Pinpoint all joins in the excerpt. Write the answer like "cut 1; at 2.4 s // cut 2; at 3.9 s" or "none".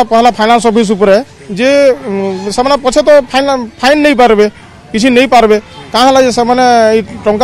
none